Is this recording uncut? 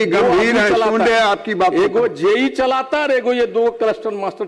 yes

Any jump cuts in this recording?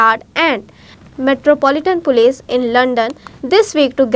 yes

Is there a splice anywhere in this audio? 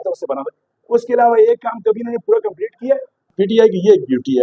yes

